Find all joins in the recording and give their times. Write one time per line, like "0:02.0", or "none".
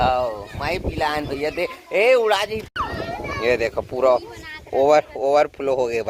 0:02.6